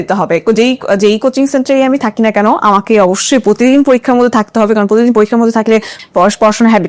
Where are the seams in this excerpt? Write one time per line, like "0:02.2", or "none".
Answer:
0:05.9